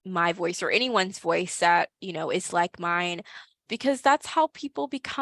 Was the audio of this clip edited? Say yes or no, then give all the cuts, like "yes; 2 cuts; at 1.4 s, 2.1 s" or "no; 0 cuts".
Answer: no; 0 cuts